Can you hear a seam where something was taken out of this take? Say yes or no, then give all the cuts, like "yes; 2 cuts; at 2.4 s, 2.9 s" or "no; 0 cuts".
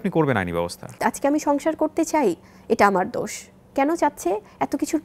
yes; 1 cut; at 1.0 s